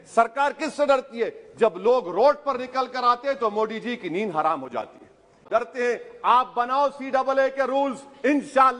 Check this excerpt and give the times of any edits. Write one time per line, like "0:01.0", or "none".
0:05.5